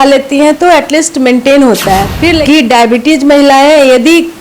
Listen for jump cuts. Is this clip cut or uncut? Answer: cut